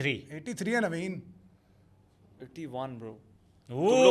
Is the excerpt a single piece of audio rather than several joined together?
yes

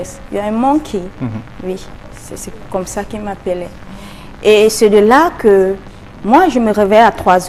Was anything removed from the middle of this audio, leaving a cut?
no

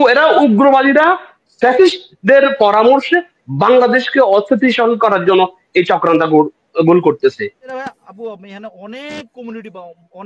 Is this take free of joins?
no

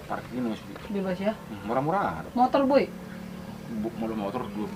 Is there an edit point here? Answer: no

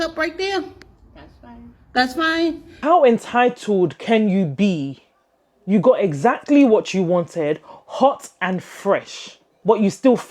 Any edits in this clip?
yes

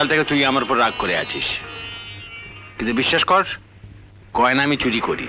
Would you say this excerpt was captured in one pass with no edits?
yes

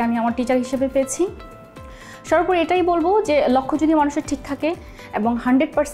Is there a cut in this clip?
no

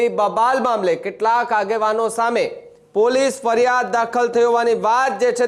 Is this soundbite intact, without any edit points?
yes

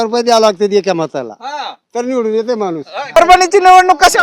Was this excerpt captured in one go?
no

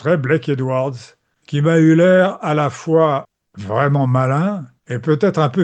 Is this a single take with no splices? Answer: yes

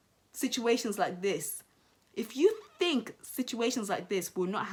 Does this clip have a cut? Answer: no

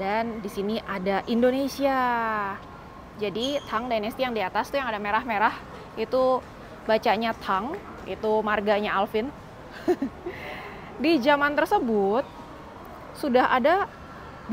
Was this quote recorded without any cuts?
yes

